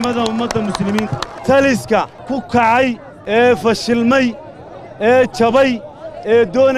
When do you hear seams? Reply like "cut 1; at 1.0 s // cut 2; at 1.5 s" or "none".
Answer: cut 1; at 1.3 s // cut 2; at 2.2 s // cut 3; at 3.1 s